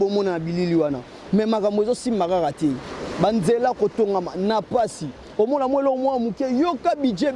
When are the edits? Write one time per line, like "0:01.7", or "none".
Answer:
none